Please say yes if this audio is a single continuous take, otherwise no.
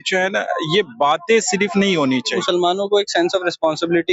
no